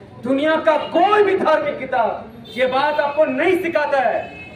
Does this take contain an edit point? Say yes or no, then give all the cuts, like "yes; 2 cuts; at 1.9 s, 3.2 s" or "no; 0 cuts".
no; 0 cuts